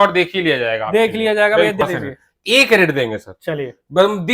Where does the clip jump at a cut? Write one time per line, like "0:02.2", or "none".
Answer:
0:01.8